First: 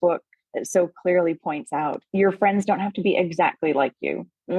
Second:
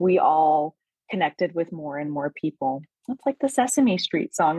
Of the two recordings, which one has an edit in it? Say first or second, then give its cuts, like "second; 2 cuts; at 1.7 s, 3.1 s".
first; 1 cut; at 2.0 s